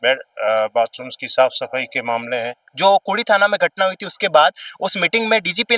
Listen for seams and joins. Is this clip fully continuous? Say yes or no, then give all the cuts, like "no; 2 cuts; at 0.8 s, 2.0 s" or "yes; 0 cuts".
no; 1 cut; at 2.7 s